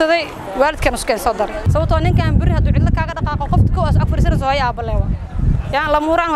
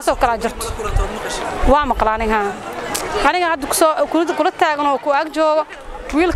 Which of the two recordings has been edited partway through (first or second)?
first